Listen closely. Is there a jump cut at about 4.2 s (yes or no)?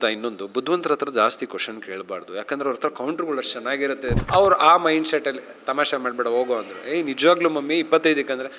yes